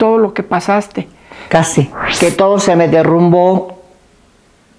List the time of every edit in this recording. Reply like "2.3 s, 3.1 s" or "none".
2.0 s